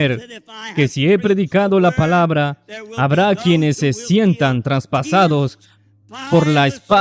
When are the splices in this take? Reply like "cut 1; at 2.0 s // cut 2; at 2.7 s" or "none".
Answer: none